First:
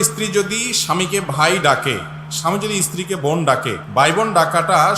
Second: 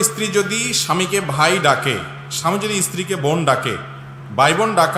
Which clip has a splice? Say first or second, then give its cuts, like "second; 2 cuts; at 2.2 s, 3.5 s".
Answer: first; 1 cut; at 3.8 s